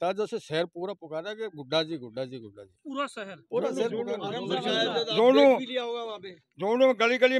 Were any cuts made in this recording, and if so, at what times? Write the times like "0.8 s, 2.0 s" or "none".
none